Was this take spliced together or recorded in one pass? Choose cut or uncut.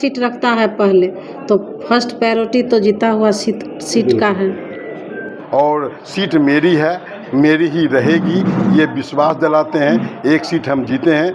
cut